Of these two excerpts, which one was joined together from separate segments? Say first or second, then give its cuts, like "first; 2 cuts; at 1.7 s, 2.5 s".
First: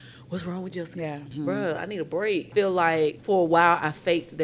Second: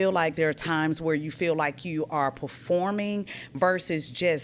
first; 3 cuts; at 1.3 s, 2.5 s, 3.2 s